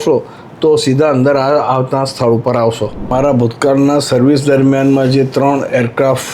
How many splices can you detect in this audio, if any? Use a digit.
1